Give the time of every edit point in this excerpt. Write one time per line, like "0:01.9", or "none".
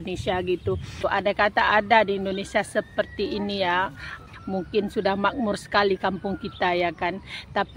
0:01.0
0:04.2